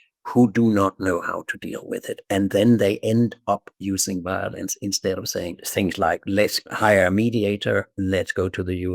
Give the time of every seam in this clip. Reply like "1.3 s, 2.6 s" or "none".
5.6 s, 6.7 s